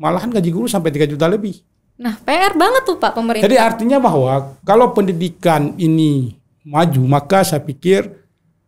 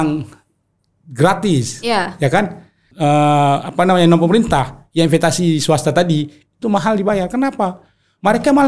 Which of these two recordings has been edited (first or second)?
second